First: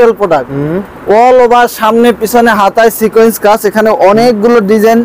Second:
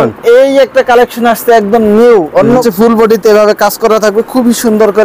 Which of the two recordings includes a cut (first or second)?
second